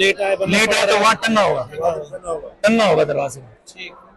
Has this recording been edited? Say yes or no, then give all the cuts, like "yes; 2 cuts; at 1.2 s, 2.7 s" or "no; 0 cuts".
no; 0 cuts